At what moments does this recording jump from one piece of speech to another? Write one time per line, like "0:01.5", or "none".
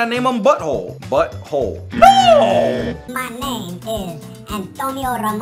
0:03.0